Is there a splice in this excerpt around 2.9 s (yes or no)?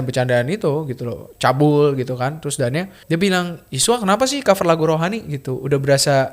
yes